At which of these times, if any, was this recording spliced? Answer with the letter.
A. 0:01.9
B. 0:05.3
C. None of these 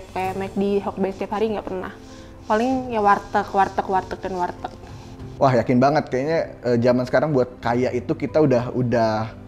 B